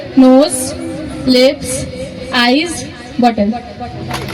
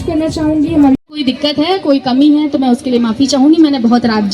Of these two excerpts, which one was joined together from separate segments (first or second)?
second